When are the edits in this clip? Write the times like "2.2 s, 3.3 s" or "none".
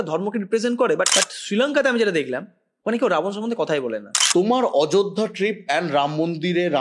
1.1 s, 4.1 s